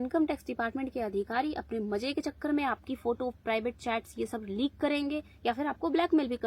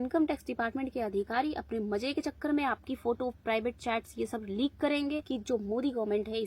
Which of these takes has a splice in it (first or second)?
second